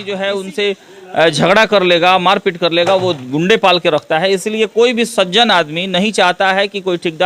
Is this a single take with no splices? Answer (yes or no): yes